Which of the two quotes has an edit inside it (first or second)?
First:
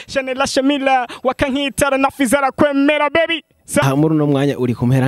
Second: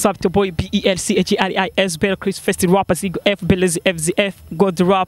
first